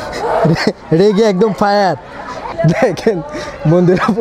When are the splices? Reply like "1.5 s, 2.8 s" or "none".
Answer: 2.4 s